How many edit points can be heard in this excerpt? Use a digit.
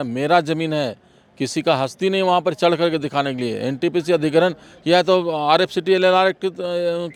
0